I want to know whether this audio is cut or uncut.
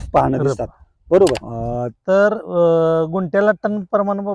cut